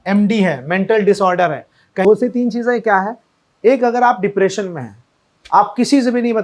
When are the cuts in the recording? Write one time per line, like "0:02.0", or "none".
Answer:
0:02.0

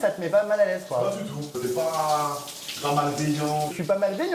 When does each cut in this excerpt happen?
0:01.6

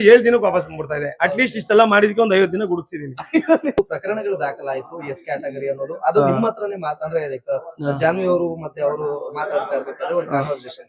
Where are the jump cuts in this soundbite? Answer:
0:03.8

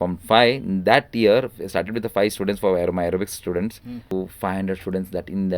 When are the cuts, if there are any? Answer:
0:04.1

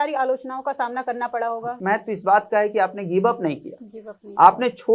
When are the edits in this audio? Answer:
0:01.8

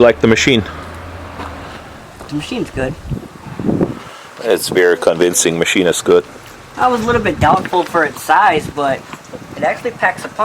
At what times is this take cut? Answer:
0:04.2

